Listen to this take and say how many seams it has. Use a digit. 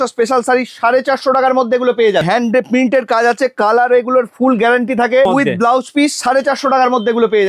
2